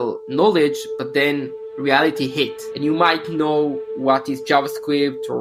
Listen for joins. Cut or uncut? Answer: uncut